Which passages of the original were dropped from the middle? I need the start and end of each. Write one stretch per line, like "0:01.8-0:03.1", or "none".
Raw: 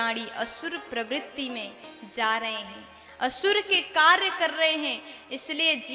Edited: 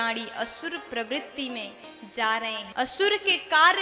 0:02.6-0:03.1